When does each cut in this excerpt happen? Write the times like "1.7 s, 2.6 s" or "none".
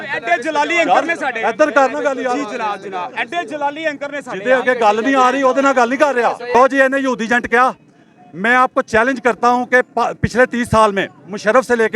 6.5 s